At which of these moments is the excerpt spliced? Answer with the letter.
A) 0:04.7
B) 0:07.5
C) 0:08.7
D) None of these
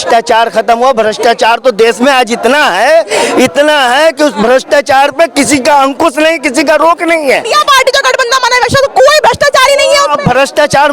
B